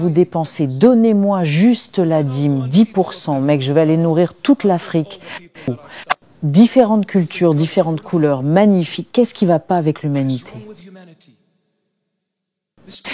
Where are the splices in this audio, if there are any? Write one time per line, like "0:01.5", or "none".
0:05.7
0:10.6